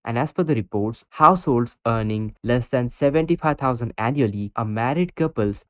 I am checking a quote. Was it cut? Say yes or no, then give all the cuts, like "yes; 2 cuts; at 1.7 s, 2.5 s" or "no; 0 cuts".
yes; 1 cut; at 4.5 s